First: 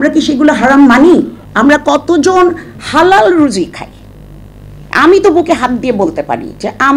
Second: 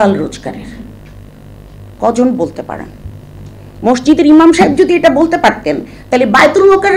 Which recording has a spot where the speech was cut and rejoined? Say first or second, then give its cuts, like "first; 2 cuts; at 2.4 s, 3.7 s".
first; 1 cut; at 1.4 s